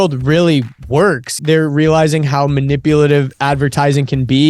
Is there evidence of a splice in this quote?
yes; 1 cut; at 1.4 s

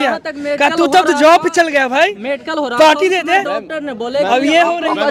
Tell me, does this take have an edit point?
no; 0 cuts

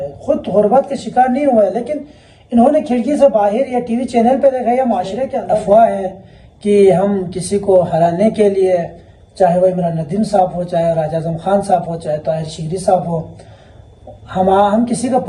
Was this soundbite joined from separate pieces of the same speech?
yes; 1 cut; at 5.4 s

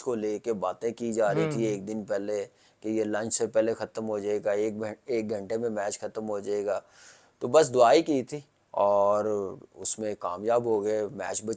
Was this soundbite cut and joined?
no; 0 cuts

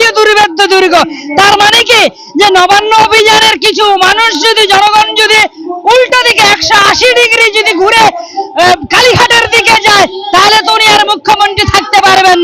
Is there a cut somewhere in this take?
no; 0 cuts

